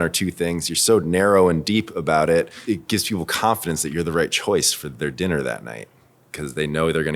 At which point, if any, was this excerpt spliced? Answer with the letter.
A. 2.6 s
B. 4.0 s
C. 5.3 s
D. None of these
A